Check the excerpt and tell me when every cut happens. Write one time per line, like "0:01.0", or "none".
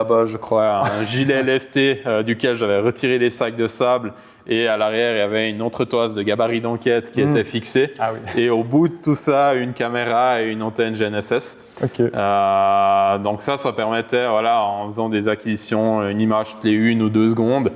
none